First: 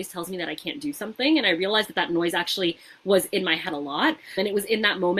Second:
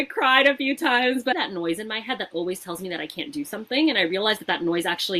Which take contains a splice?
second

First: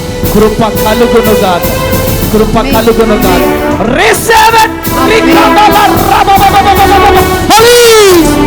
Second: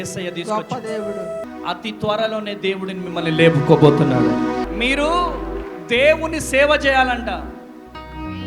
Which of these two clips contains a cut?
second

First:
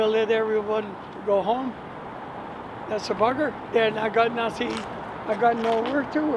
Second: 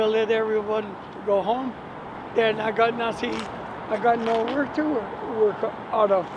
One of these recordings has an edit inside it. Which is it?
second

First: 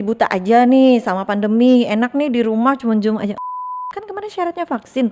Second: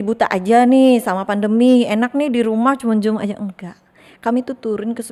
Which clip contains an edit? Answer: first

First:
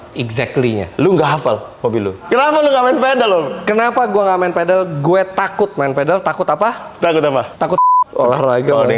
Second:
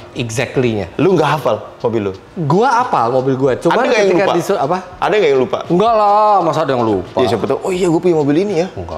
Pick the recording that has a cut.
first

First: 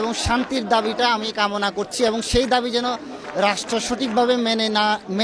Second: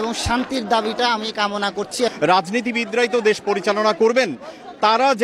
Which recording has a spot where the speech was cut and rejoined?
second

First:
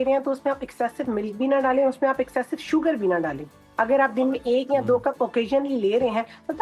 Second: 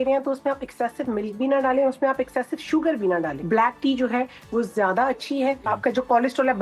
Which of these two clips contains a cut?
second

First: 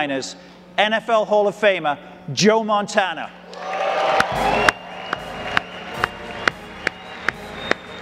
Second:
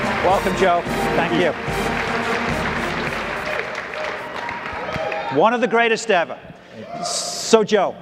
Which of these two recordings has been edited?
second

